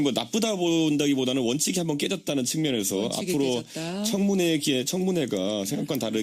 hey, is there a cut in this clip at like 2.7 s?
no; 0 cuts

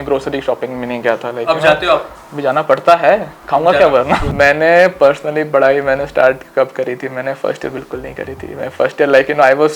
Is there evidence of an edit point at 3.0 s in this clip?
no; 1 cut; at 4.3 s

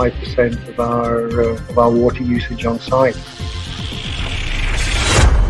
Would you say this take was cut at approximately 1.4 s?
no; 1 cut; at 4.6 s

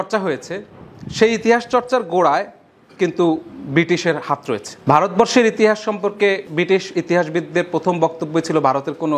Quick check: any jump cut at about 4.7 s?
yes; 1 cut; at 4.7 s

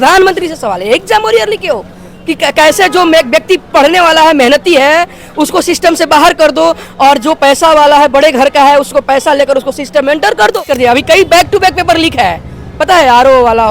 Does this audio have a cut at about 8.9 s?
no; 1 cut; at 10.6 s

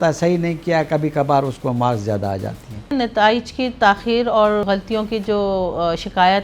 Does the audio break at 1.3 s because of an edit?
no; 2 cuts; at 2.9 s, 4.6 s

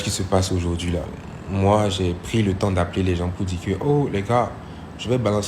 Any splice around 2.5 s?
no; 1 cut; at 1.2 s

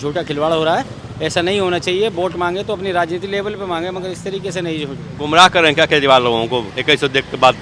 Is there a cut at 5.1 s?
no; 0 cuts

